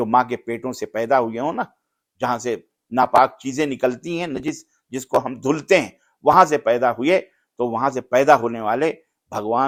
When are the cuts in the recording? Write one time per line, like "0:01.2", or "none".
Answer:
none